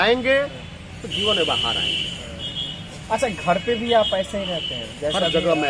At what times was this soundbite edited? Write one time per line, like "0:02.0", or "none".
none